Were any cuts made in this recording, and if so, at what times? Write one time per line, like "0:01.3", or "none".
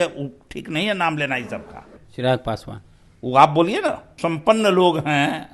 0:02.0
0:04.1